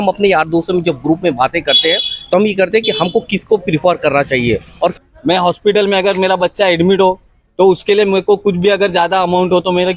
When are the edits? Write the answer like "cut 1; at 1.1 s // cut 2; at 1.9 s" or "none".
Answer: cut 1; at 5.0 s